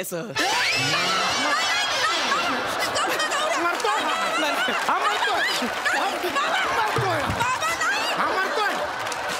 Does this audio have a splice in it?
no; 0 cuts

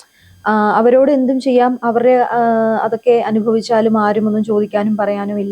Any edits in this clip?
no; 0 cuts

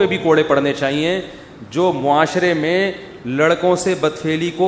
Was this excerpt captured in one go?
yes; 0 cuts

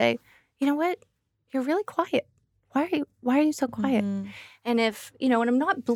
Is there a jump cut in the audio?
no; 0 cuts

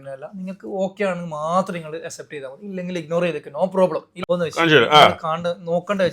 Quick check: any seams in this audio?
yes; 1 cut; at 4.1 s

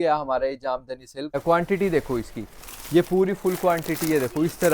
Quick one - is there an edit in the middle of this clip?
yes; 1 cut; at 1.3 s

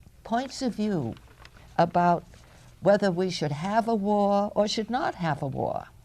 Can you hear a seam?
yes; 1 cut; at 3.2 s

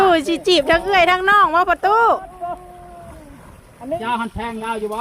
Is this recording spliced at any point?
yes; 1 cut; at 4.0 s

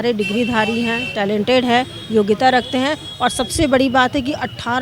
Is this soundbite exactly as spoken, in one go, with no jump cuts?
yes; 0 cuts

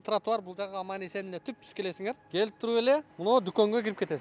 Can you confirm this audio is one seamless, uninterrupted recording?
no; 2 cuts; at 2.2 s, 3.1 s

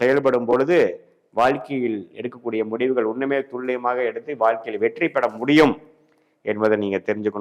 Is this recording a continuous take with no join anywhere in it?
yes; 0 cuts

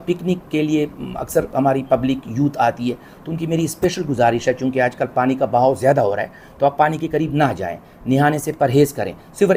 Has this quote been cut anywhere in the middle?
no; 0 cuts

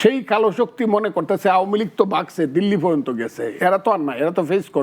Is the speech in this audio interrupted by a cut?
no; 0 cuts

